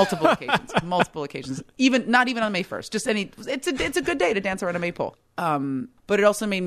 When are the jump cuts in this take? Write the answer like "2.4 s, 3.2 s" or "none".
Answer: 5.4 s